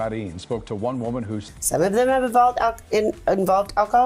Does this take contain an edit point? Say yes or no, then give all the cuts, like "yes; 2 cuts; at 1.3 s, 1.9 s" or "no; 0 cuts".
yes; 1 cut; at 1.5 s